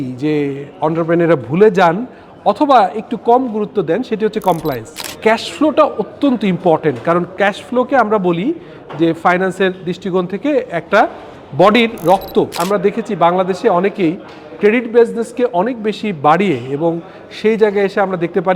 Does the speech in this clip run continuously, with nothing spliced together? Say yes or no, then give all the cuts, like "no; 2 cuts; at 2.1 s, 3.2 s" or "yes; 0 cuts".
no; 2 cuts; at 5.0 s, 12.5 s